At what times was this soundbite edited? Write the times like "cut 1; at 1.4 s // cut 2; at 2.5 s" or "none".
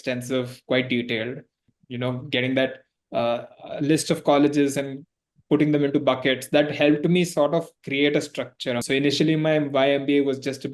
cut 1; at 1.7 s // cut 2; at 8.8 s

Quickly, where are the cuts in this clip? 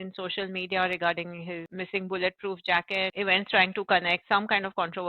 cut 1; at 1.7 s // cut 2; at 3.1 s // cut 3; at 4.2 s

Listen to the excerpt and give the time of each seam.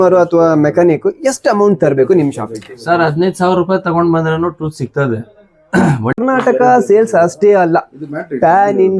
cut 1; at 6.2 s

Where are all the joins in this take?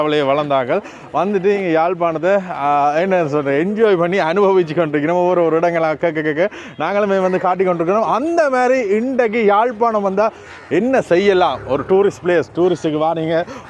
none

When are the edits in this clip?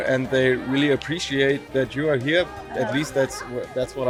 none

